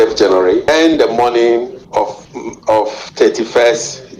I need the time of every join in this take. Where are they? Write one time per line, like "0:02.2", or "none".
0:01.9